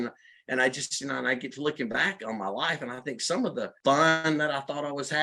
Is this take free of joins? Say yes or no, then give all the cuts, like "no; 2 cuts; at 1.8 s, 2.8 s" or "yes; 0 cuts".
no; 1 cut; at 3.7 s